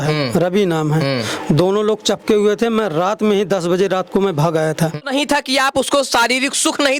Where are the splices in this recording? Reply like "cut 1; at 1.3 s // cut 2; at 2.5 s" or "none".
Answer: cut 1; at 5.0 s